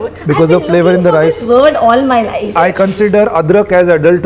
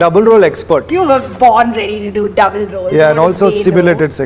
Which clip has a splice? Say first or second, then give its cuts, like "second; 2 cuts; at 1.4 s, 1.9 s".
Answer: first; 1 cut; at 2.6 s